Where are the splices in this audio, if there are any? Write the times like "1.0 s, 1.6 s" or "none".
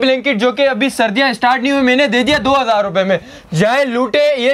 none